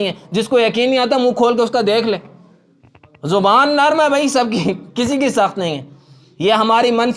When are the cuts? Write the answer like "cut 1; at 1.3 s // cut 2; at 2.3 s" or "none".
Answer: none